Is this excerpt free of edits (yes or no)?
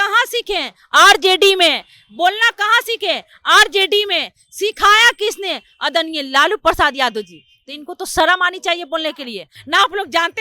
no